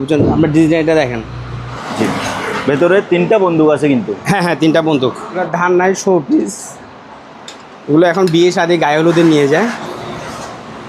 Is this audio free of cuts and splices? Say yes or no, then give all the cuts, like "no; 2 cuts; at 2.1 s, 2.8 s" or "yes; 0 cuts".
no; 3 cuts; at 1.7 s, 5.5 s, 9.9 s